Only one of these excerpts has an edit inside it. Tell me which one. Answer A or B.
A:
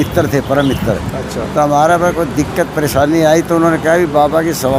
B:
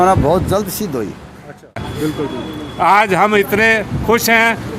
B